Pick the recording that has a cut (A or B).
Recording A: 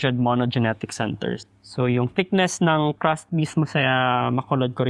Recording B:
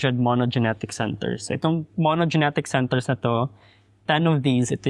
A